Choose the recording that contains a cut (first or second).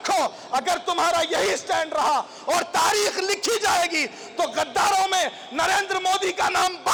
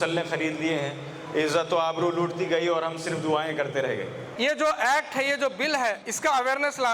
second